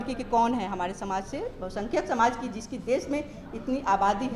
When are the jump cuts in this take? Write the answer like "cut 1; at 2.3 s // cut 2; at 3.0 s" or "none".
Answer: none